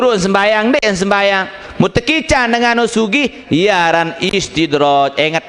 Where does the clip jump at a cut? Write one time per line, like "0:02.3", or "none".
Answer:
none